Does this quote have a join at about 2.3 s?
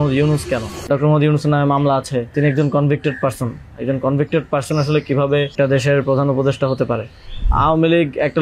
yes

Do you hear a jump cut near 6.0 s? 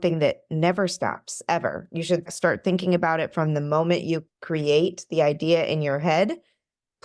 no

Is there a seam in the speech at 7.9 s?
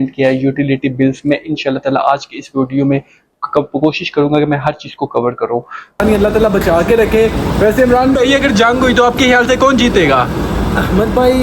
no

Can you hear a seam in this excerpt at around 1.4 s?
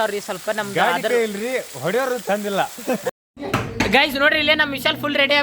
no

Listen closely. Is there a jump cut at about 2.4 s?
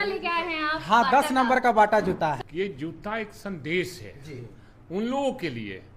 yes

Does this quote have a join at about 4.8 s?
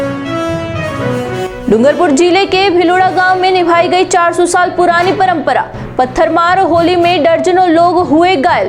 no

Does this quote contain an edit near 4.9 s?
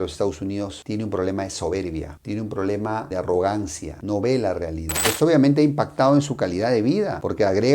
yes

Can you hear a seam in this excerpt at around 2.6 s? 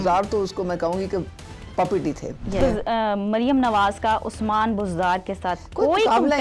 yes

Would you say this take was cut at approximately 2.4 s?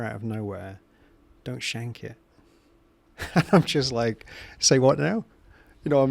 no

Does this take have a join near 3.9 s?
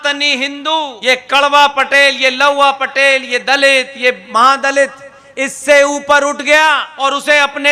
no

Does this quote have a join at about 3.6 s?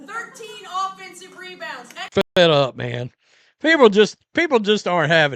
no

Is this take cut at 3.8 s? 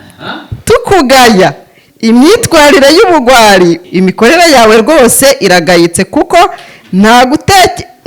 yes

